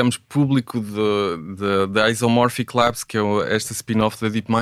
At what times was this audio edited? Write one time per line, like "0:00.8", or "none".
none

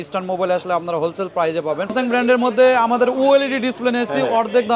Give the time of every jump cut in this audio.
0:01.9

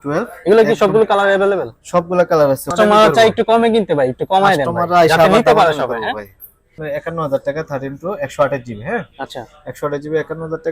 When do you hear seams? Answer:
0:02.7
0:06.8

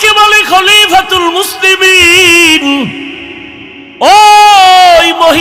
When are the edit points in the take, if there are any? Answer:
none

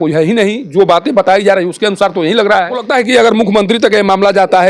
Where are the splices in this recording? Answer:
0:02.9

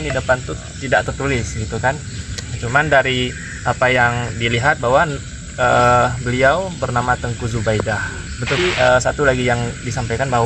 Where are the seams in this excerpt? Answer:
0:08.6

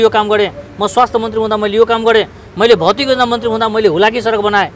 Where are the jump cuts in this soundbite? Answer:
none

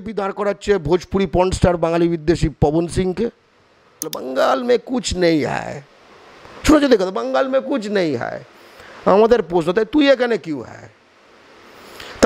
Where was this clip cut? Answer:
0:04.1

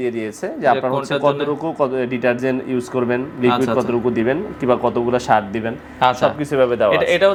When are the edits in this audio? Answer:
none

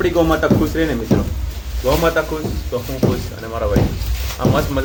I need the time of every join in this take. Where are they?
none

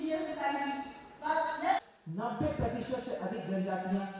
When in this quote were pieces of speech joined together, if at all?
0:01.8

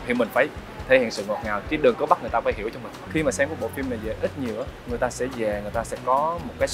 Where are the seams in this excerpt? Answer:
0:03.0

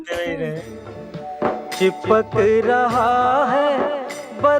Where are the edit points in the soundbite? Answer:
none

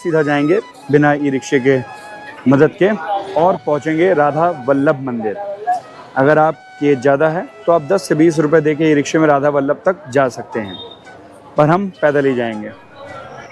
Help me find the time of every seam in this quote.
none

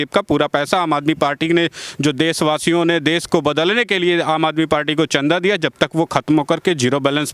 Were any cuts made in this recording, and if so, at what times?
none

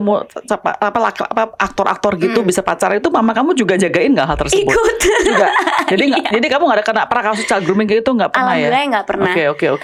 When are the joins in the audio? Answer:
none

